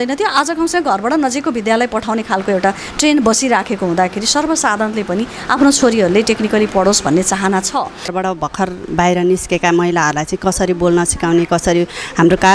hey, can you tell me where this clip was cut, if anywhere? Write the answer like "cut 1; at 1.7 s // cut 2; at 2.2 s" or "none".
cut 1; at 8.1 s